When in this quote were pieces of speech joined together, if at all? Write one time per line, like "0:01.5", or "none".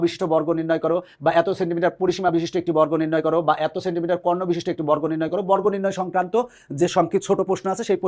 none